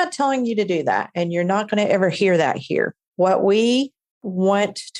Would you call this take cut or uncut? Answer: uncut